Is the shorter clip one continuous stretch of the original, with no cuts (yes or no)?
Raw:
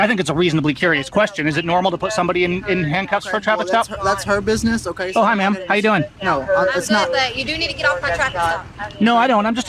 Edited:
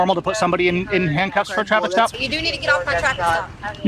no